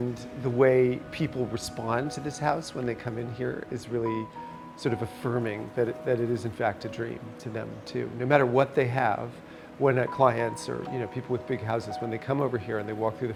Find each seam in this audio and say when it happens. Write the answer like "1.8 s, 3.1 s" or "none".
none